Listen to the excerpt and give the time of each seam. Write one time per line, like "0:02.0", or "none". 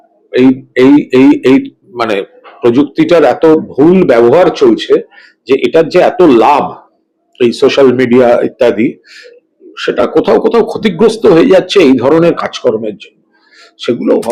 none